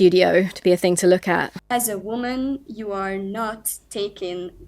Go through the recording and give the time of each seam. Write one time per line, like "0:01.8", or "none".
0:01.6